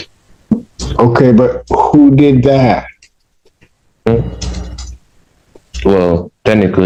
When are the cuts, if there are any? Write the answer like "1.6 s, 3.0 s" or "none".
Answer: none